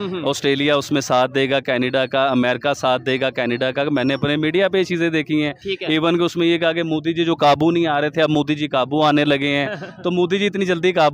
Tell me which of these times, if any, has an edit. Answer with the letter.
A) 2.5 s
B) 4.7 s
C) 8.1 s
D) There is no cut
D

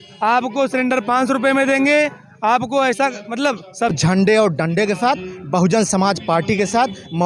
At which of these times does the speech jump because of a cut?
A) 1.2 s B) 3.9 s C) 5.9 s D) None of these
B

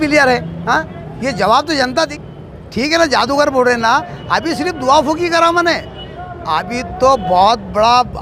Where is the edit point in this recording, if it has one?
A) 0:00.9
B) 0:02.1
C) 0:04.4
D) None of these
B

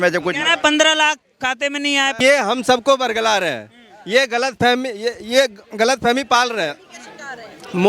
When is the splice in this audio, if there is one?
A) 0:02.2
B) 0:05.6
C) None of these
A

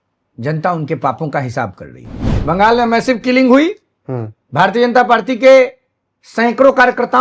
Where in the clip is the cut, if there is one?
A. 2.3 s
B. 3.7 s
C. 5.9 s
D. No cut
A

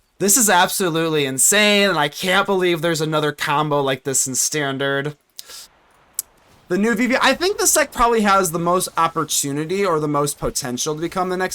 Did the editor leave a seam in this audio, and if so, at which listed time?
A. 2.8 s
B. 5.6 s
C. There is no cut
B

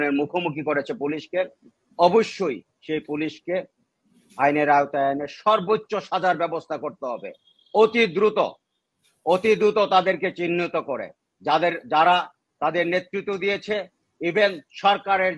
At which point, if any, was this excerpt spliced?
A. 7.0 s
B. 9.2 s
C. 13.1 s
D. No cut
D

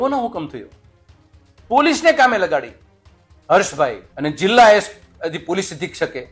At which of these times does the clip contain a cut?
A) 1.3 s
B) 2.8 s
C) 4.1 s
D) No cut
C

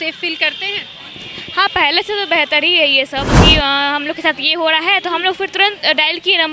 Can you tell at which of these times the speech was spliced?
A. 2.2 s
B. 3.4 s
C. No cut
B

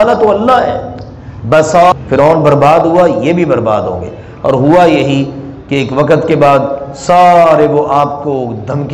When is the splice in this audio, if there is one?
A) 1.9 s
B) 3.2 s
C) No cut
A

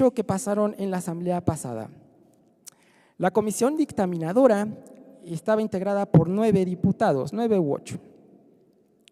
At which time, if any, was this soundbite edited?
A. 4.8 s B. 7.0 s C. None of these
B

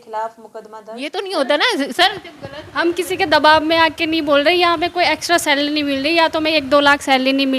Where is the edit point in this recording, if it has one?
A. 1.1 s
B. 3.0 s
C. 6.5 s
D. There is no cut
A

